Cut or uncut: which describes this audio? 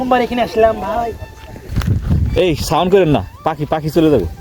cut